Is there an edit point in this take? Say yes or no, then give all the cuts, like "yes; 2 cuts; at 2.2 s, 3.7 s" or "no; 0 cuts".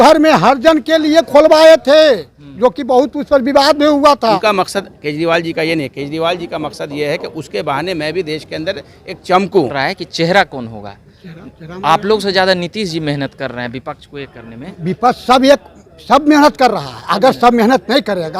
yes; 2 cuts; at 4.4 s, 9.7 s